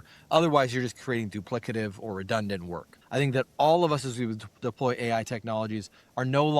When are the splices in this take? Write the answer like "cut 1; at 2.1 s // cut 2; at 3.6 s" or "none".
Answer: cut 1; at 2.9 s